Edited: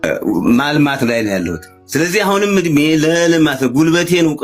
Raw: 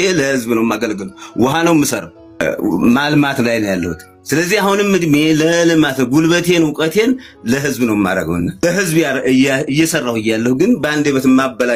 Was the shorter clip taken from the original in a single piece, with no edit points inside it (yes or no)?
yes